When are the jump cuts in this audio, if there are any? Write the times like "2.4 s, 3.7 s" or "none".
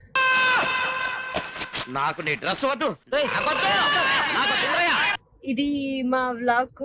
5.3 s